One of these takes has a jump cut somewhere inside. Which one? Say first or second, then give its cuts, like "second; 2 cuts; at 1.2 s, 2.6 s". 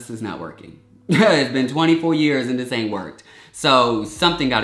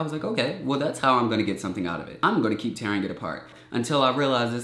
second; 2 cuts; at 2.1 s, 3.5 s